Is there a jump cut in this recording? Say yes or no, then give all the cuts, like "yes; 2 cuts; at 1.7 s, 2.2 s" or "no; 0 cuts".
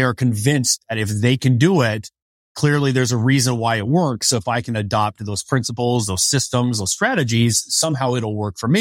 no; 0 cuts